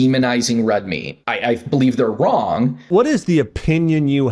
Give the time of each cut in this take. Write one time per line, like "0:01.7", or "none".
0:01.1
0:02.9